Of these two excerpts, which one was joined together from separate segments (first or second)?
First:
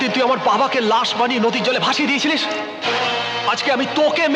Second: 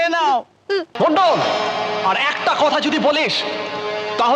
second